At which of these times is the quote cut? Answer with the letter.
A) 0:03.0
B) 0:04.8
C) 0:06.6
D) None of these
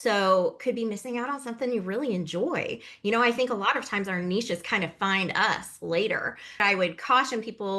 C